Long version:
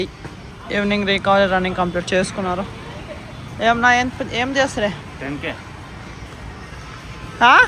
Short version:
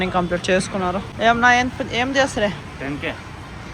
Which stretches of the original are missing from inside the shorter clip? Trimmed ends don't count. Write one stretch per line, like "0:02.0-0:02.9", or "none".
0:02.7-0:03.5